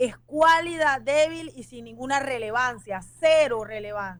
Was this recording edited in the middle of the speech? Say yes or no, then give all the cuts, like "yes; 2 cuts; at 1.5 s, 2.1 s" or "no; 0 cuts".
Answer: no; 0 cuts